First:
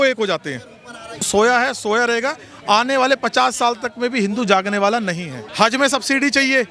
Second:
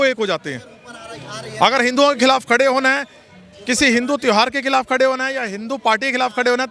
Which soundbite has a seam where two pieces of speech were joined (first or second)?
first